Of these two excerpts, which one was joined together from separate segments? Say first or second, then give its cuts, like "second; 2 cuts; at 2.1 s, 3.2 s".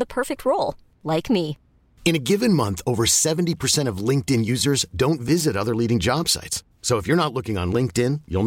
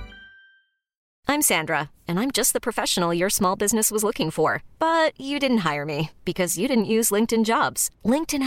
second; 1 cut; at 1.0 s